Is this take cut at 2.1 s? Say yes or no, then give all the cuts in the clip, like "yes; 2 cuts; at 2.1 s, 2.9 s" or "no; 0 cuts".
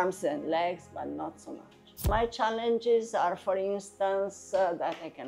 yes; 1 cut; at 2.1 s